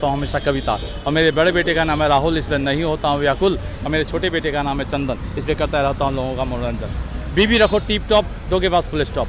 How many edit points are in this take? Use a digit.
0